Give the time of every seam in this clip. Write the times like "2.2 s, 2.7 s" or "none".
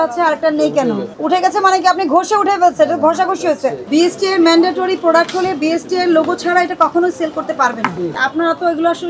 1.1 s, 3.8 s, 8.2 s